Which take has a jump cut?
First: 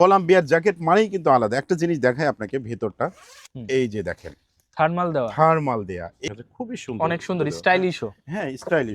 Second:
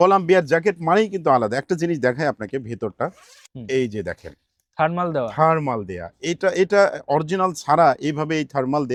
first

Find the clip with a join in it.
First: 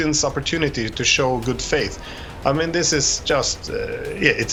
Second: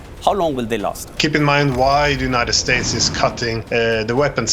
second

